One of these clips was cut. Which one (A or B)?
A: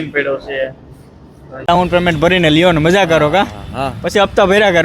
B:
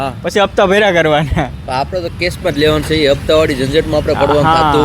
A